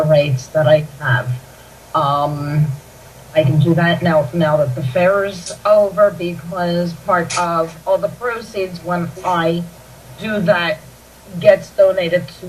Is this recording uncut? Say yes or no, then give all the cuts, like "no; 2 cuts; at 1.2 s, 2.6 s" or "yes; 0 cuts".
no; 1 cut; at 10.4 s